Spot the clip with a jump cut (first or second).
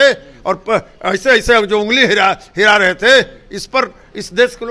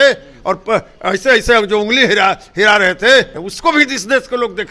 second